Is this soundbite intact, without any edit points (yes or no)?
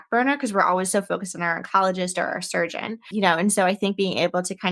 no